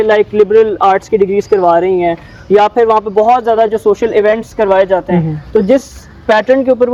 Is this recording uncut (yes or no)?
yes